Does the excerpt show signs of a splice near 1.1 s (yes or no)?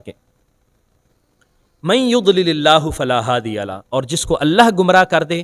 no